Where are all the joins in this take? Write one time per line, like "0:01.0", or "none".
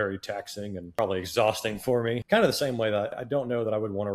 0:00.9
0:02.2
0:03.1